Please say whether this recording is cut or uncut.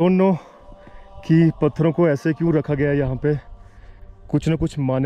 uncut